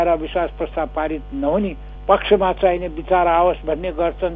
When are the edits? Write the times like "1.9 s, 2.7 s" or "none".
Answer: 1.9 s